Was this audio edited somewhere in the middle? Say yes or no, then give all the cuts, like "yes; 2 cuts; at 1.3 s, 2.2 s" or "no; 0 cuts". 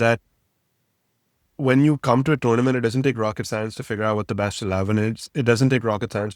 no; 0 cuts